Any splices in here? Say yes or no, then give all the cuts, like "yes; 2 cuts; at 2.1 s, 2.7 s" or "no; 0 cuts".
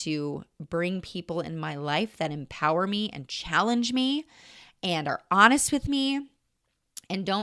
no; 0 cuts